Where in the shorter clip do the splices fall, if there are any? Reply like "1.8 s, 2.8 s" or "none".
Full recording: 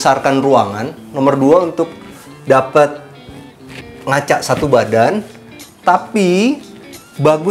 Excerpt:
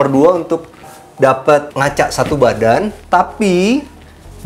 1.7 s, 3.0 s